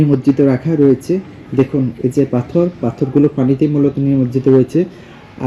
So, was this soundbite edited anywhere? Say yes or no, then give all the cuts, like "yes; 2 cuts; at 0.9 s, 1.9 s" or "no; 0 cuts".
no; 0 cuts